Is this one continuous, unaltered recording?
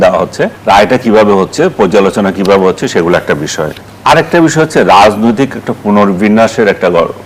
yes; 0 cuts

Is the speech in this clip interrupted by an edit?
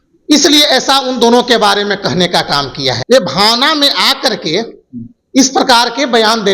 yes; 1 cut; at 3.0 s

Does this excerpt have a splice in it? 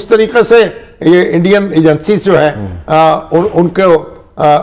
no; 0 cuts

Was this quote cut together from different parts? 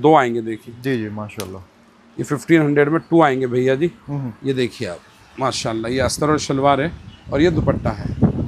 no; 0 cuts

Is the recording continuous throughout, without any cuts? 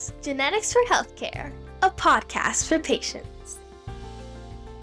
yes; 0 cuts

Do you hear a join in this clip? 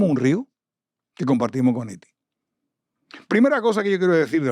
no; 0 cuts

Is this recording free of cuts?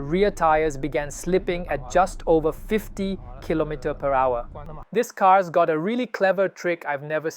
no; 1 cut; at 4.7 s

